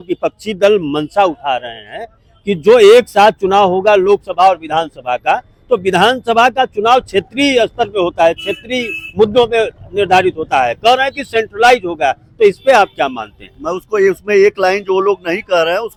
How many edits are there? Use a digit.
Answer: 0